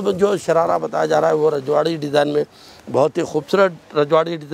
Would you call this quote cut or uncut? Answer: uncut